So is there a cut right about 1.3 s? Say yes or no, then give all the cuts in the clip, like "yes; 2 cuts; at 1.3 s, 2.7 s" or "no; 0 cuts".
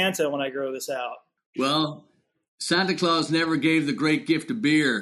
yes; 1 cut; at 1.3 s